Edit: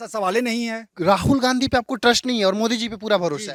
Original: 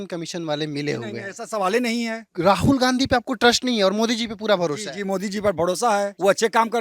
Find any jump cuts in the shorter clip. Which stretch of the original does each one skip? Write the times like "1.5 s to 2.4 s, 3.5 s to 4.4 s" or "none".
none

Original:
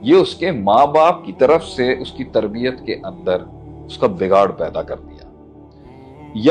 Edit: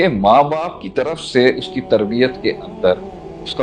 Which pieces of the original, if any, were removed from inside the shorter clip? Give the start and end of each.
none

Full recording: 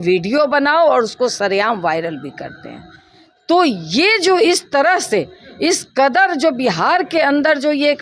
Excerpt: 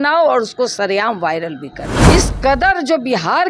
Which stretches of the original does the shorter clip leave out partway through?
2.5 s to 5.4 s

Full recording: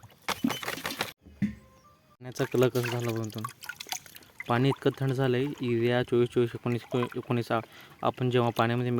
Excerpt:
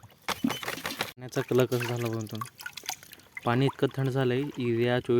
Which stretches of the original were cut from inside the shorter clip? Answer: 1.2 s to 2.2 s

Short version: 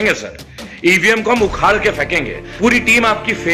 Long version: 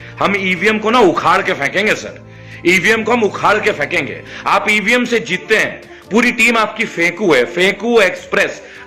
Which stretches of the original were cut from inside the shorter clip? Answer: 4.2 s to 5.9 s

